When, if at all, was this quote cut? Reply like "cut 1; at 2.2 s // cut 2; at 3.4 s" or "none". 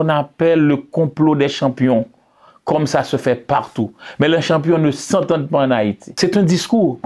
cut 1; at 6.1 s